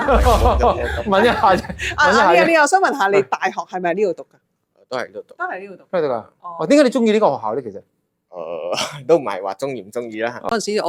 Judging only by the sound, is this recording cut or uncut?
uncut